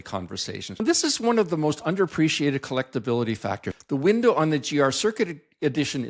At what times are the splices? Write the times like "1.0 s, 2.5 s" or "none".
0.8 s, 3.7 s